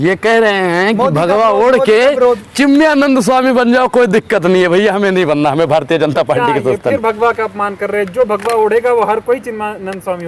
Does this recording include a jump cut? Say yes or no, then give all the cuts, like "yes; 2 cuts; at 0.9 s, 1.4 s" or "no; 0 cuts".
no; 0 cuts